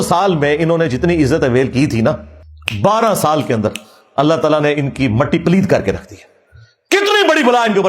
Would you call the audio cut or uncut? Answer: uncut